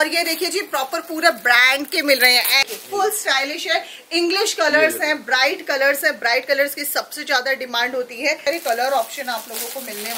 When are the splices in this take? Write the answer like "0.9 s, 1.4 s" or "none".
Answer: 2.6 s, 8.5 s